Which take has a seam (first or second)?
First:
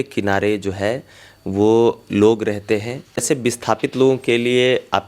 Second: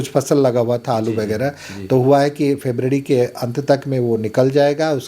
first